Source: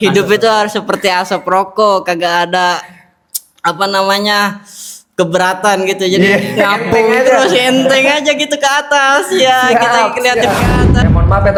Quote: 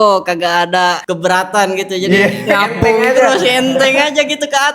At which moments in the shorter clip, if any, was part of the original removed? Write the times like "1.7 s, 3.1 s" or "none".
1.1 s